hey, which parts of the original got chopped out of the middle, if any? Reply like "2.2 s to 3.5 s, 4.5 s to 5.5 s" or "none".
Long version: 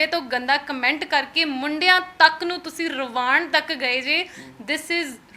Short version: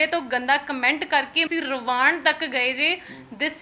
1.4 s to 2.7 s

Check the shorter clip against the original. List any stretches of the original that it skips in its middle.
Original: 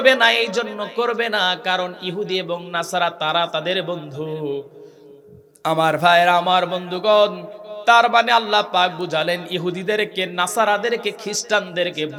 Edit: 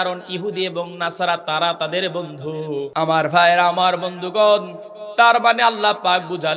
4.6 s to 5.6 s

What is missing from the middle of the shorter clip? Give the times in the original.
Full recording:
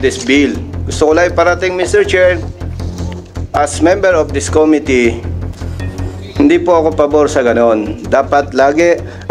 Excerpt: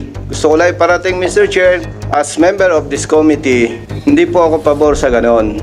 2.5 s to 3.4 s, 5.3 s to 6.2 s

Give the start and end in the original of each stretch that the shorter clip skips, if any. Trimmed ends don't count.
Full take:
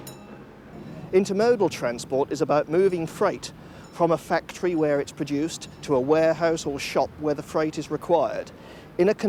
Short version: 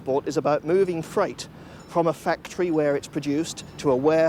none

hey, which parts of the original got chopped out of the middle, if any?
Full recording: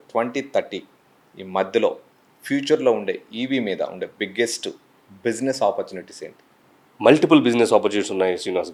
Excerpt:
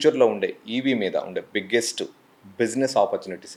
none

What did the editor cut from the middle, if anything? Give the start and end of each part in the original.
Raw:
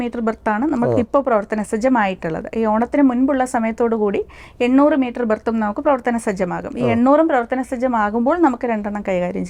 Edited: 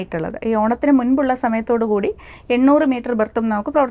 none

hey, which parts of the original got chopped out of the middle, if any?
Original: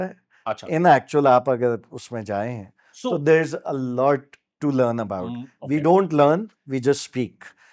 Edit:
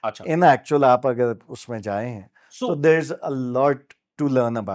none

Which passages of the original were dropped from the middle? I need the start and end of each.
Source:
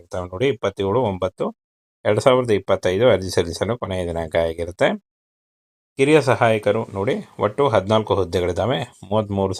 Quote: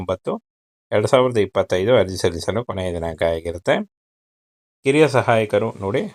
none

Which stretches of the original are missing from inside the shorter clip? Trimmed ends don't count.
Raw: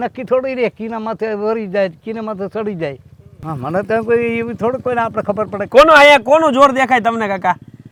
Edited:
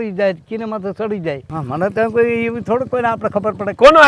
3.1 s to 3.4 s

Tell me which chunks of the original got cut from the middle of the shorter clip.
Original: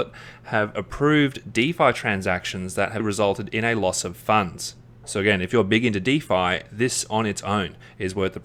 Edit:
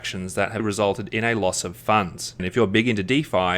4.9 s to 5.4 s

